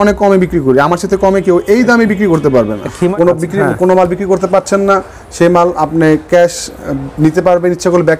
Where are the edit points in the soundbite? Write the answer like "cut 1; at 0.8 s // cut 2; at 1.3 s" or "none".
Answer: cut 1; at 2.9 s